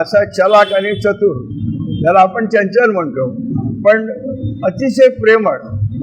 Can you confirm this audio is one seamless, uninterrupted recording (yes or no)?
yes